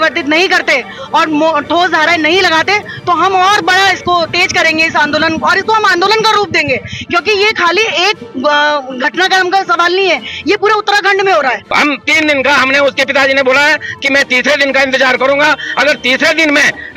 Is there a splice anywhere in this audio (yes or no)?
yes